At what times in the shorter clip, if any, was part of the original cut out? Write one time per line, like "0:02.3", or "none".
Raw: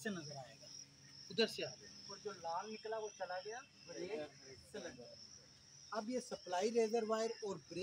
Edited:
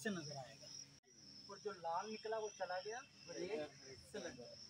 0:01.2

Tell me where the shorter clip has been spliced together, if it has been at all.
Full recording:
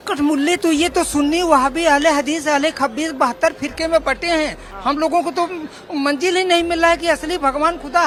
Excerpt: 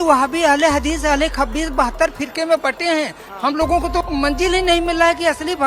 0:04.1

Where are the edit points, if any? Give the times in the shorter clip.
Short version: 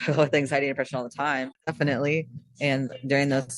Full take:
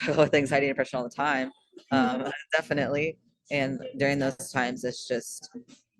0:01.7

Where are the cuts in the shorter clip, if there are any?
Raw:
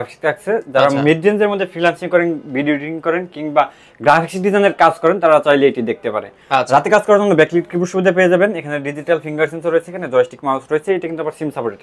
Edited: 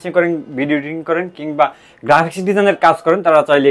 none

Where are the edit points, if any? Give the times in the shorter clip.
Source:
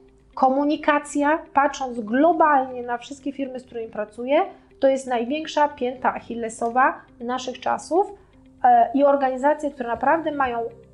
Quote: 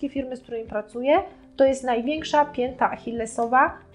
none

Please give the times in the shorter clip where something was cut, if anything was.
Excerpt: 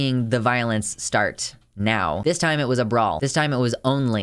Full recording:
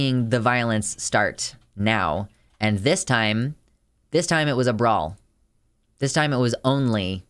0:02.2
0:03.2

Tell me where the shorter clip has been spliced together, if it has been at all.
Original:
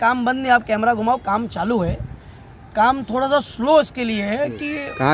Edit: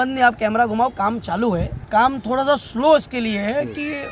0:01.8

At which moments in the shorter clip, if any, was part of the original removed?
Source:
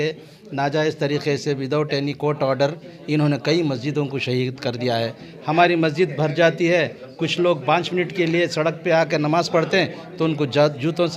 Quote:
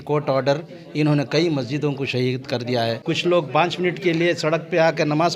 0:03.0

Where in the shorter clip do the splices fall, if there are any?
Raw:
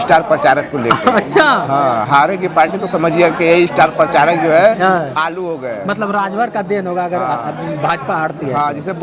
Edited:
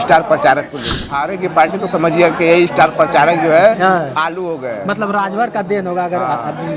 0:01.0

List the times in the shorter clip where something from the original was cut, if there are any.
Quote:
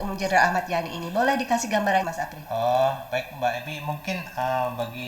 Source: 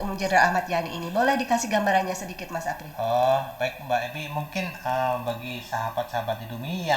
0:02.1

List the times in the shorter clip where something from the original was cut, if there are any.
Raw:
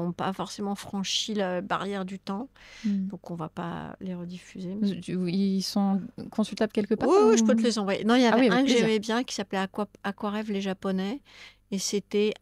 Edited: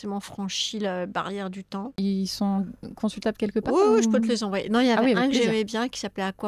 0:02.0

